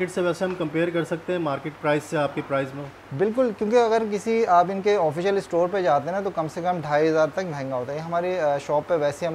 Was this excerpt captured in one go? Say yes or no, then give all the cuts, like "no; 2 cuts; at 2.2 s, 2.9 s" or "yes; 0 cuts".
yes; 0 cuts